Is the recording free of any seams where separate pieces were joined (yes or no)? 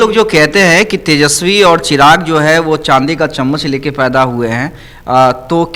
yes